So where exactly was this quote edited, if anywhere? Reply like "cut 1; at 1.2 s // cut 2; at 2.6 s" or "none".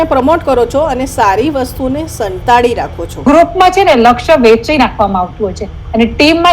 cut 1; at 3.2 s